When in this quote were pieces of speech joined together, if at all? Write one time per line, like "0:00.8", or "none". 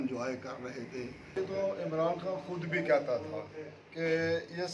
0:01.3